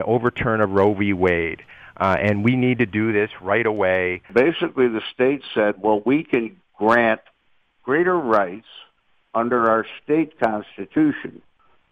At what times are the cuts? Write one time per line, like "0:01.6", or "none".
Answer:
0:04.3